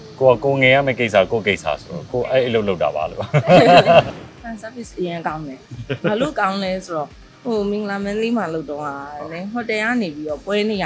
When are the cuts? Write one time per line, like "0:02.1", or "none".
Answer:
0:04.1